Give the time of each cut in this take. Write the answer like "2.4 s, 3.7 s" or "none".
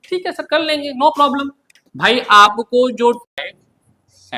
3.3 s